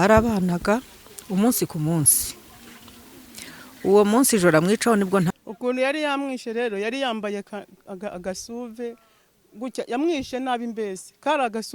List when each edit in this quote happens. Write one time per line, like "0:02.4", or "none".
0:05.3